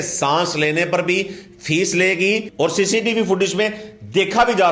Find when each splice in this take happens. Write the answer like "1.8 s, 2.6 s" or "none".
2.5 s